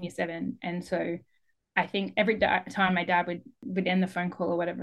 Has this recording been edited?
yes; 1 cut; at 3.6 s

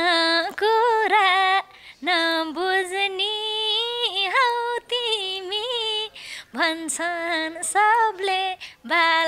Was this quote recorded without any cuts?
yes; 0 cuts

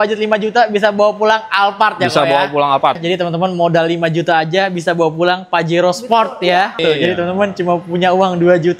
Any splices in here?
yes; 2 cuts; at 3.0 s, 6.8 s

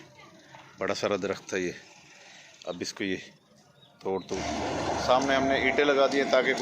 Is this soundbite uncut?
no; 1 cut; at 4.4 s

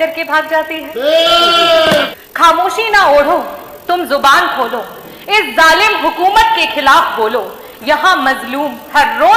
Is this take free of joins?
no; 1 cut; at 2.1 s

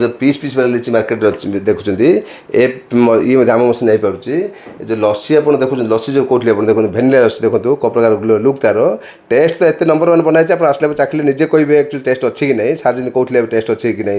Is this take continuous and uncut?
yes; 0 cuts

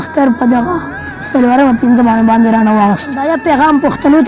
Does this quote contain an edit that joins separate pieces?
yes; 1 cut; at 3.3 s

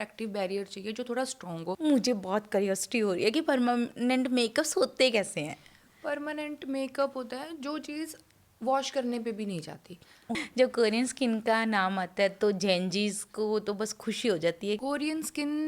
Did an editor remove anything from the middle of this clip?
yes; 3 cuts; at 1.8 s, 10.4 s, 14.8 s

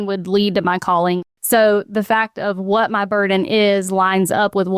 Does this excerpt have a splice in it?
yes; 1 cut; at 1.2 s

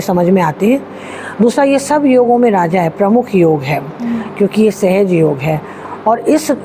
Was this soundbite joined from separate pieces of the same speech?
no; 0 cuts

